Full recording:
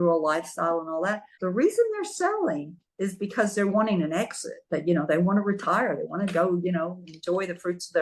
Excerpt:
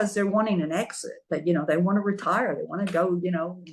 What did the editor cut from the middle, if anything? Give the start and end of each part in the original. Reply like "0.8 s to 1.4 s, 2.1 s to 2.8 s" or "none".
none